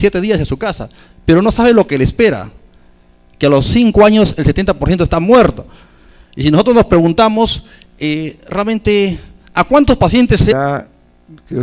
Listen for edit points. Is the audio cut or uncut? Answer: uncut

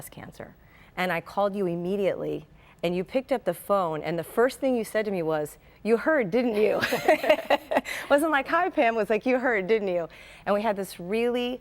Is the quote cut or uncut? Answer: cut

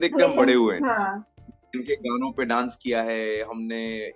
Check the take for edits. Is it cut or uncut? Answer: uncut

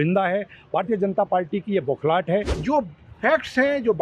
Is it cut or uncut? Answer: cut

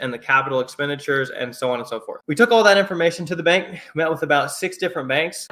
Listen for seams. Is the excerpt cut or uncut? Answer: cut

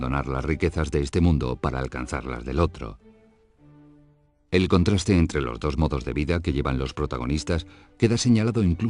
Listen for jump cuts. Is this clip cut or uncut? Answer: cut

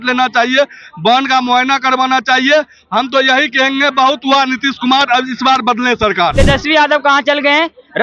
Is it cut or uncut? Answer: cut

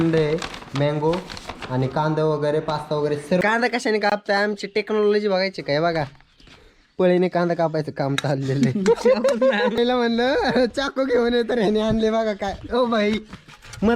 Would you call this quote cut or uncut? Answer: cut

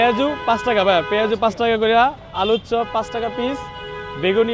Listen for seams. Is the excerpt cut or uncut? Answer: uncut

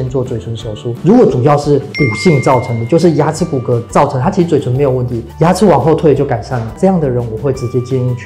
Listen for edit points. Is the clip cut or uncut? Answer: uncut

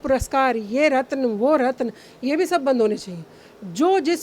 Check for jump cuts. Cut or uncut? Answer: uncut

